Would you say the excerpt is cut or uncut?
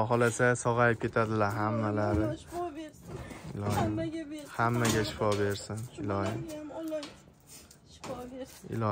uncut